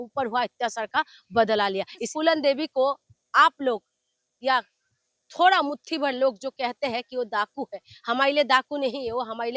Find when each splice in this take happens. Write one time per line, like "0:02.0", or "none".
0:02.0